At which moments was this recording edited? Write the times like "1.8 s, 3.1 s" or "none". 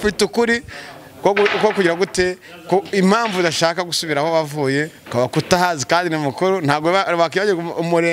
none